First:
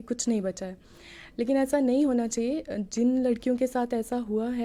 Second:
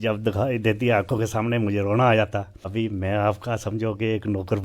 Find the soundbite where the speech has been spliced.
second; 1 cut; at 2.7 s

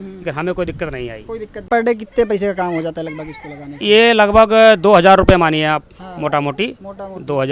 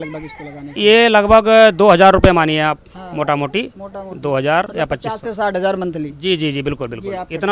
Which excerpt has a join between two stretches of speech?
first; 1 cut; at 1.7 s

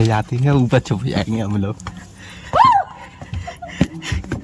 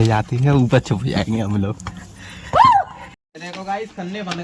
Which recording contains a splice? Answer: second; 1 cut; at 3.3 s

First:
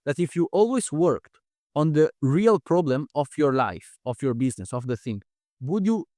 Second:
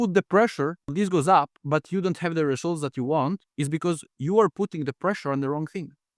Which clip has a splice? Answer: second; 2 cuts; at 0.9 s, 1.6 s

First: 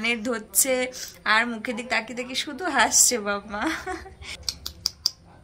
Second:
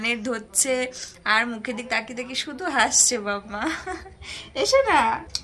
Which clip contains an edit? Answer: first; 1 cut; at 4.4 s

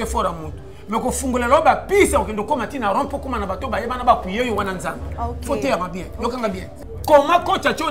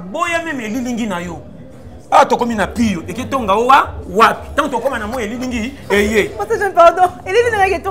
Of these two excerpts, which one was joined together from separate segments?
first; 1 cut; at 6.7 s

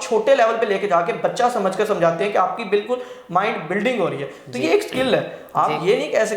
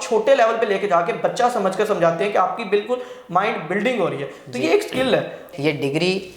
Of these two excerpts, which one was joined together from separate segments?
second; 1 cut; at 5.5 s

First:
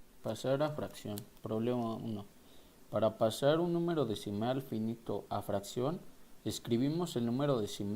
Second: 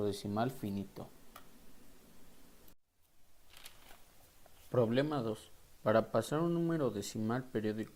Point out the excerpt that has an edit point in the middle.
first; 1 cut; at 4.5 s

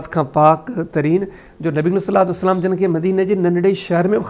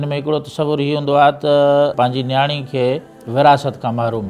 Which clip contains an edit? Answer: second; 1 cut; at 1.9 s

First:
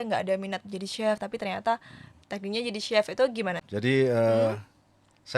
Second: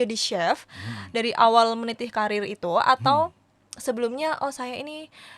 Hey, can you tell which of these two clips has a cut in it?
first; 1 cut; at 3.7 s

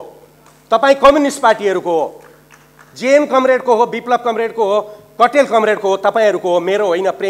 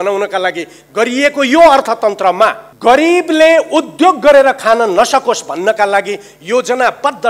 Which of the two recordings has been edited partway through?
second; 1 cut; at 2.7 s

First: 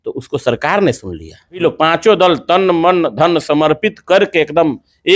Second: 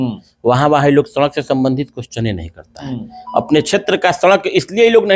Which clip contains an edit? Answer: first; 1 cut; at 1.6 s

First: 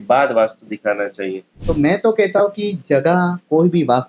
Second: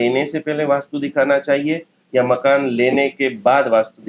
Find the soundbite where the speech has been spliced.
first; 1 cut; at 1.7 s

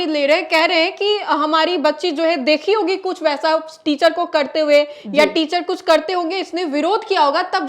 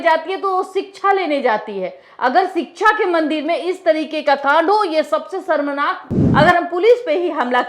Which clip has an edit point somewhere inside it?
second; 1 cut; at 6.2 s

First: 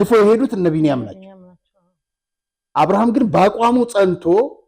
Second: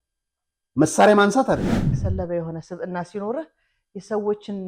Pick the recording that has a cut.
second; 1 cut; at 1.8 s

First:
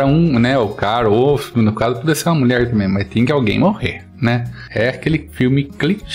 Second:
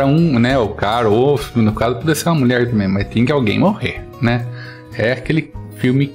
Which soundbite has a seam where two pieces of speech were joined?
first; 2 cuts; at 4.6 s, 5.3 s

